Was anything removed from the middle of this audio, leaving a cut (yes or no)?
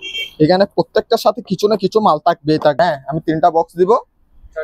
yes